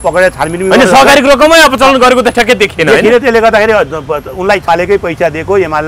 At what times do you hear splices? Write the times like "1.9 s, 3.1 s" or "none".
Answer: 4.6 s